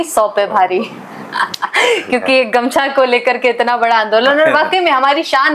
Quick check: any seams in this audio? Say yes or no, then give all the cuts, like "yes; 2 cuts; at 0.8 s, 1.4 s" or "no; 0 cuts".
no; 0 cuts